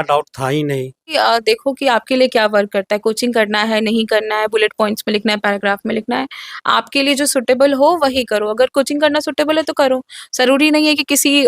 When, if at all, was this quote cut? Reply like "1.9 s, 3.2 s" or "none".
1.0 s